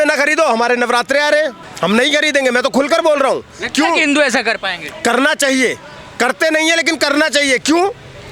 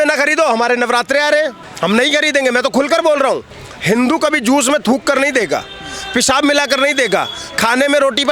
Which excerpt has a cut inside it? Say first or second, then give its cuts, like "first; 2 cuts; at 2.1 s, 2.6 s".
second; 1 cut; at 3.6 s